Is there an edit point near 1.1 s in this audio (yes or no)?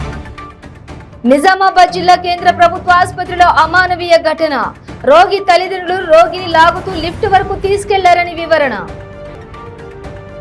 yes